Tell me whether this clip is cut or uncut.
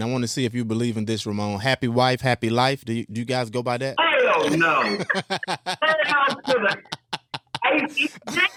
uncut